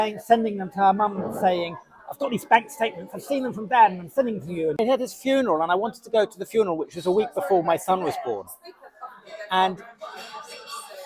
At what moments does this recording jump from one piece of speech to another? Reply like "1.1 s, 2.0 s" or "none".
4.8 s